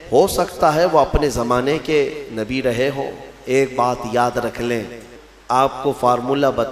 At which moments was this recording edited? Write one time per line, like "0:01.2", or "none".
0:05.1